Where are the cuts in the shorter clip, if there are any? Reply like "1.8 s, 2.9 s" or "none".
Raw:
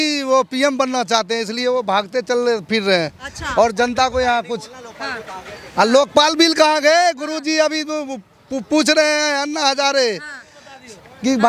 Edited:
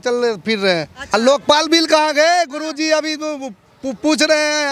1.1 s